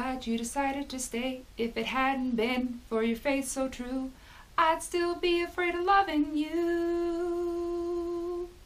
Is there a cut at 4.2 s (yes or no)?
no